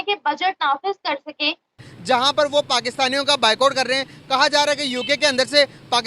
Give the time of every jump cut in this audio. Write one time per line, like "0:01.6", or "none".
0:01.9